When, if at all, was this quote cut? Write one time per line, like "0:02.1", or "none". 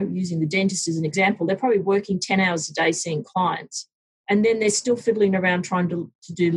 0:01.1